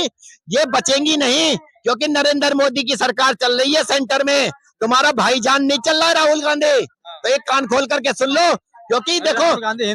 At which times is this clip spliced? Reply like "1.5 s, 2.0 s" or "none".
none